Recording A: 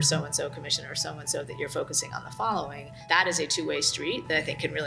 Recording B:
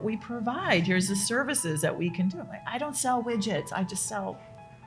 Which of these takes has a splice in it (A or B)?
A